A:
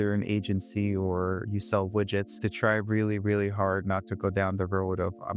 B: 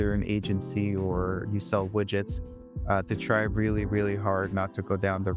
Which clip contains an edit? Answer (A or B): A